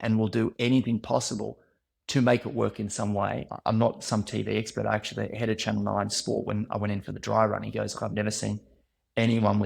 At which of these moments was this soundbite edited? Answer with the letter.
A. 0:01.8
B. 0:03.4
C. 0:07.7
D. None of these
B